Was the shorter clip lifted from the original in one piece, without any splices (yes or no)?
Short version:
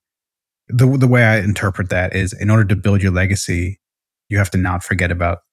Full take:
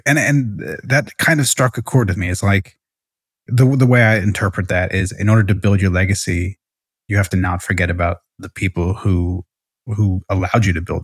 yes